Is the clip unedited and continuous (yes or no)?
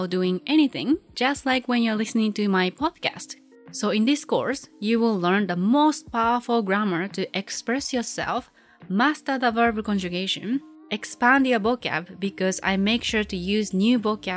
no